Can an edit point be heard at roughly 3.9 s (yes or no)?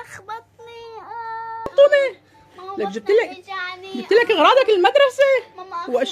no